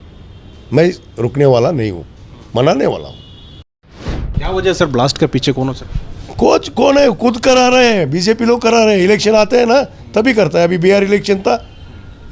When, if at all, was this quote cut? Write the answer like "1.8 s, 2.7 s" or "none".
4.1 s